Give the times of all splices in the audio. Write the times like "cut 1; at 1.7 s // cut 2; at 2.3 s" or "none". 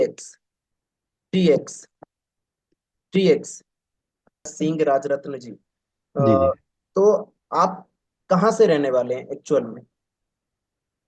cut 1; at 4.5 s

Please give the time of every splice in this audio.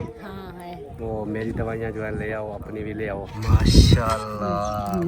cut 1; at 3.3 s

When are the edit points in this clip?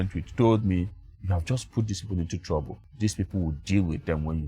cut 1; at 2.8 s

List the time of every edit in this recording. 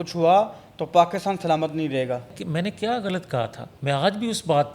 cut 1; at 2.4 s // cut 2; at 3.7 s

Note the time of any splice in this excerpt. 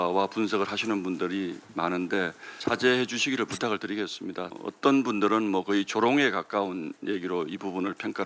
none

